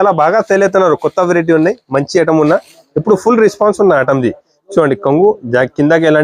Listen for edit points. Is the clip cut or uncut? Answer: uncut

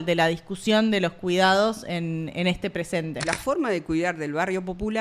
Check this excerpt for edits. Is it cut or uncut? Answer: cut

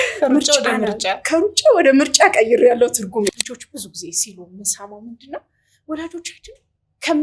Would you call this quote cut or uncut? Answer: cut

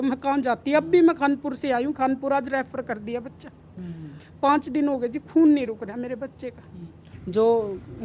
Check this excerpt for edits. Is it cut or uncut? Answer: cut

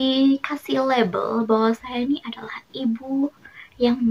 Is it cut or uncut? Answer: uncut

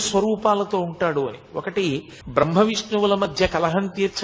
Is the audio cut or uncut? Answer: cut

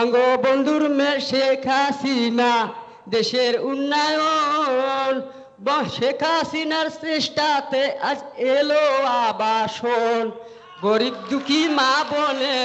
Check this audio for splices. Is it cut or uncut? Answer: uncut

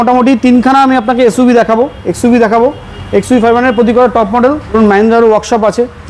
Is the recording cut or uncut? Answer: cut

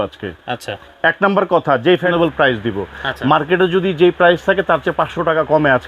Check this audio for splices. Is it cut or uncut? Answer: cut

